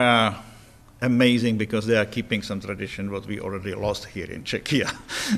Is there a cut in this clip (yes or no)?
no